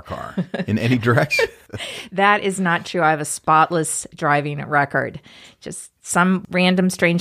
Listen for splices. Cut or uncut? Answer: cut